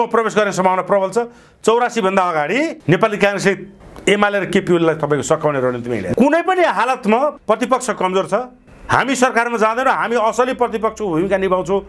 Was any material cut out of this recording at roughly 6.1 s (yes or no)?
yes